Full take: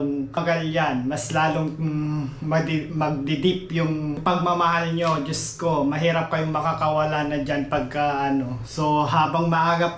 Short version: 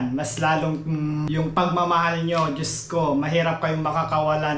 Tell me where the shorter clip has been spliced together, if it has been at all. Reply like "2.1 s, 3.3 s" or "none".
1.4 s